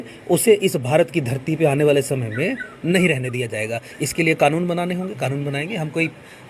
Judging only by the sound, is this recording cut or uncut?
uncut